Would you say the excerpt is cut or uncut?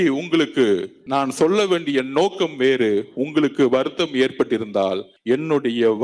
cut